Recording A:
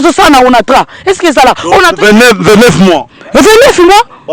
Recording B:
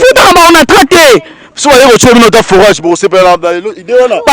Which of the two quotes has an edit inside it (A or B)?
B